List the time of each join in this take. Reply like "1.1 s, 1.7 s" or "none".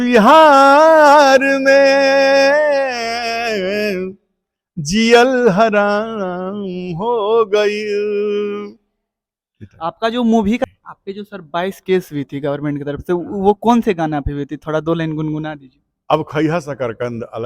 10.6 s